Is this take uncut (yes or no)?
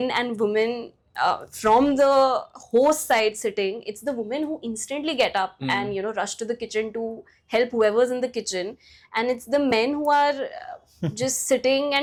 yes